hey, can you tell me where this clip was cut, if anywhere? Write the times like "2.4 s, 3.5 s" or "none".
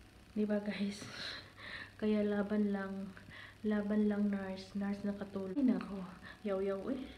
5.6 s